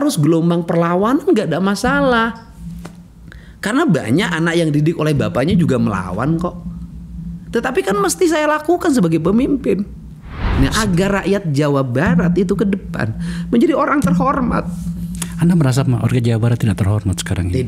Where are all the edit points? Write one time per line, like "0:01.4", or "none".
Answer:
0:10.4